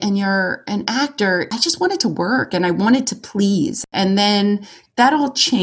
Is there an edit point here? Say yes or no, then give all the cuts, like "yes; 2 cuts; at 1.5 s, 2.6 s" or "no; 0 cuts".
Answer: yes; 2 cuts; at 1.5 s, 3.8 s